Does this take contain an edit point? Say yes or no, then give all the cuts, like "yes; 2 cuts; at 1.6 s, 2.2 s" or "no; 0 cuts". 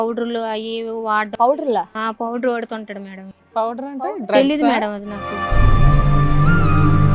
yes; 1 cut; at 5.5 s